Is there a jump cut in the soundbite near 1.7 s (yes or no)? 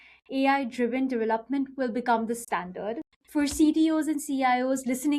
no